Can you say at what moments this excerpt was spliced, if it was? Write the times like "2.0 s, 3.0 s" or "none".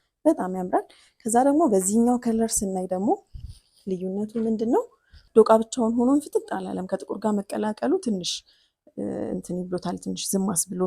5.1 s